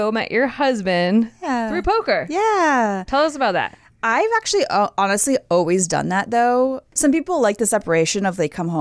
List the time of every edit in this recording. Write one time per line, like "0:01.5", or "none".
0:06.9